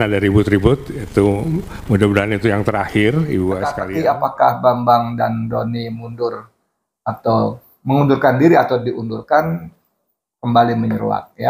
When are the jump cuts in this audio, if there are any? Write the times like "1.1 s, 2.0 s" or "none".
3.8 s